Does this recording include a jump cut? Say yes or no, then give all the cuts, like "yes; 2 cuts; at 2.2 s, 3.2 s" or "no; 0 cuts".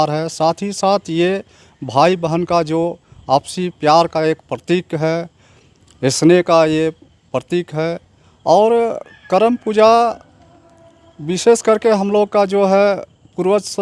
no; 0 cuts